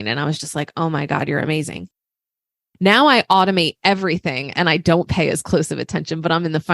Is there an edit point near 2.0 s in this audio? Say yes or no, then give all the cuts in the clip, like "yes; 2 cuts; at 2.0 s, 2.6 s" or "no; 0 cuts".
yes; 1 cut; at 2.0 s